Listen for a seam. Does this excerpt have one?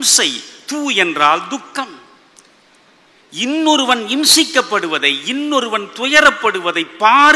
no; 0 cuts

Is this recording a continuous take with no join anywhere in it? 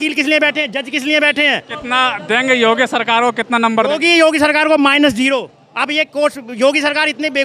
no; 1 cut; at 1.7 s

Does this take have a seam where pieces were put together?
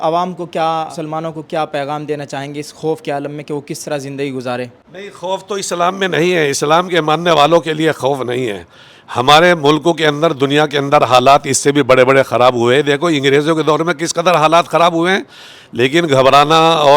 yes; 1 cut; at 0.9 s

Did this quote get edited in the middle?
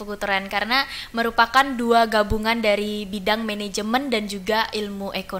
no; 0 cuts

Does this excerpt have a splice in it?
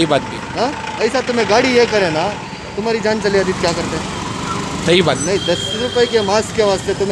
no; 0 cuts

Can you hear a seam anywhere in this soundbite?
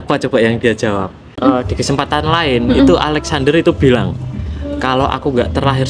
yes; 1 cut; at 1.2 s

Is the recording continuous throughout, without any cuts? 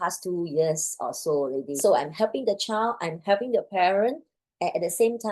no; 1 cut; at 1.8 s

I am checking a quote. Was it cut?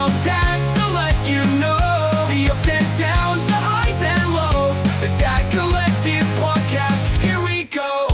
no; 0 cuts

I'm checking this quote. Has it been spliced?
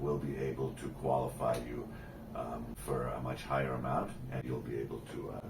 yes; 2 cuts; at 2.7 s, 4.4 s

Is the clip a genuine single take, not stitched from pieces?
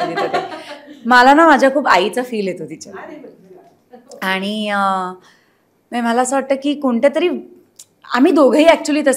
yes; 0 cuts

